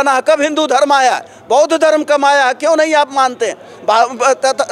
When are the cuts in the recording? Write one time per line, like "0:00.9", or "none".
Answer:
none